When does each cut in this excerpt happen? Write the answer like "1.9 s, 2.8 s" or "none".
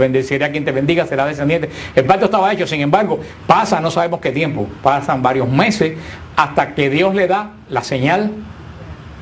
8.1 s